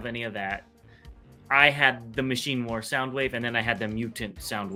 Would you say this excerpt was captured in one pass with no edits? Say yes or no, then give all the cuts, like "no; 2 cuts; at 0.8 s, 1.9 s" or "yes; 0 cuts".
yes; 0 cuts